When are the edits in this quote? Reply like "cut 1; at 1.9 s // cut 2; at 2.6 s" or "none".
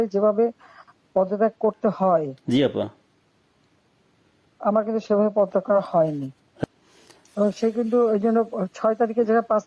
cut 1; at 6.6 s

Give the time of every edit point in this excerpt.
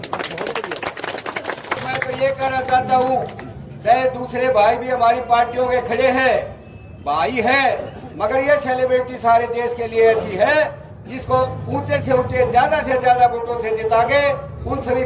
cut 1; at 1.8 s

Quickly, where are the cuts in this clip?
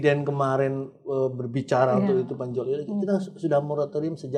none

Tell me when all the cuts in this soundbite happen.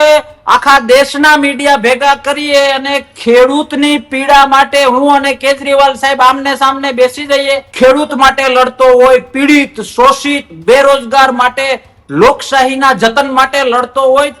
cut 1; at 7.7 s

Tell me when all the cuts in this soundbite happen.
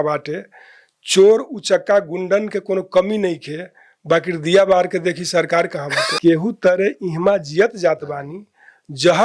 cut 1; at 6.2 s

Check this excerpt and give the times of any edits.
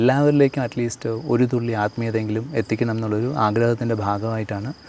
none

